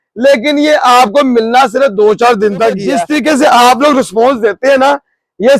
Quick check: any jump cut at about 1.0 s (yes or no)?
no